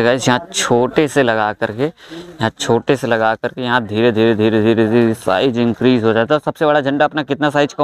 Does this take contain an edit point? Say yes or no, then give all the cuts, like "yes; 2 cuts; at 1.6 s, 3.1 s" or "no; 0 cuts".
no; 0 cuts